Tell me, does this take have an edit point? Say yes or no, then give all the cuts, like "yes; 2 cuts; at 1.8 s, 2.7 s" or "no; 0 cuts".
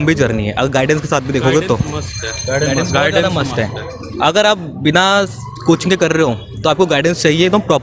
no; 0 cuts